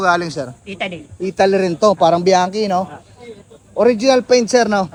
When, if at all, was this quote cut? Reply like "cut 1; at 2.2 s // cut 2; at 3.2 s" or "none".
none